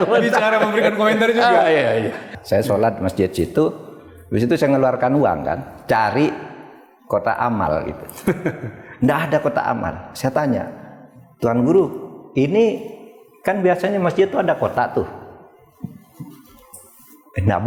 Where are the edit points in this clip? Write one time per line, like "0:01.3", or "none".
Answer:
0:02.3